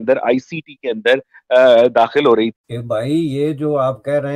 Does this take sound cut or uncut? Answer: cut